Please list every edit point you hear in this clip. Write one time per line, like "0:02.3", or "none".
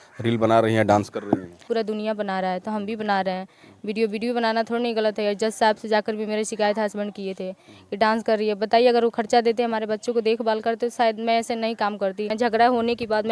0:01.6
0:12.3